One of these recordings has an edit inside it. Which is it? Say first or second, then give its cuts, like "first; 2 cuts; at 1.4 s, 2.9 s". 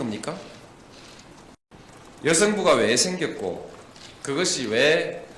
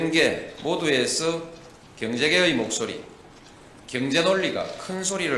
first; 1 cut; at 1.6 s